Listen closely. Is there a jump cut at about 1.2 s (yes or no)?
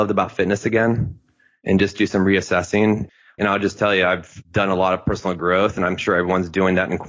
no